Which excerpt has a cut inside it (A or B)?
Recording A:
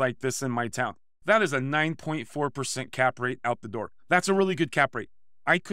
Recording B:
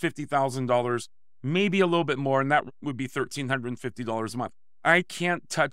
A